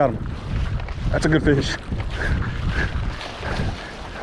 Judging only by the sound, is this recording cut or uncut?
uncut